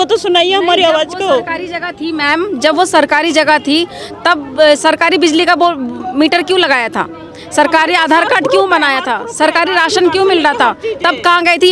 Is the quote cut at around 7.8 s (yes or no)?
no